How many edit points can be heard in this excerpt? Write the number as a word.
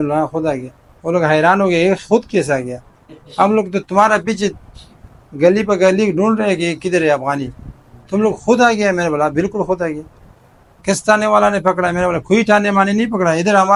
zero